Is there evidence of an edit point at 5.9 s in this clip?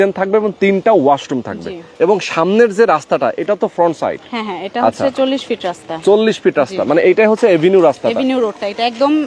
no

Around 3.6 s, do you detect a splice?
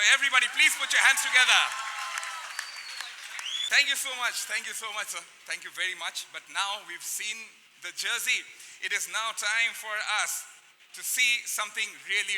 yes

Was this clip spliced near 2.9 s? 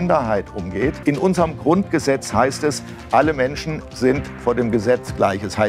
no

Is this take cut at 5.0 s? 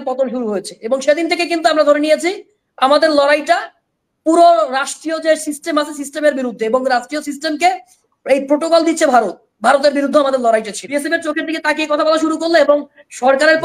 no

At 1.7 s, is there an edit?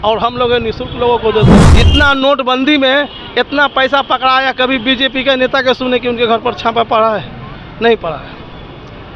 yes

